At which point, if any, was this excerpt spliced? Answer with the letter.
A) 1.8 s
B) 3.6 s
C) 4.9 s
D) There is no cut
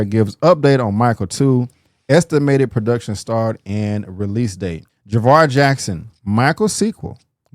C